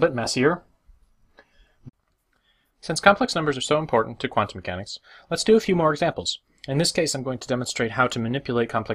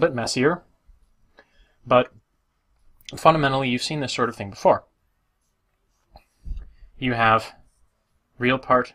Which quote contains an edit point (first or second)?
second